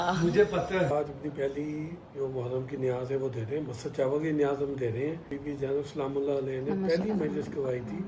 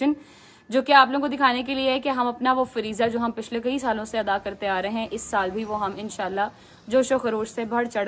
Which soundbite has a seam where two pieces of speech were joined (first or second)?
first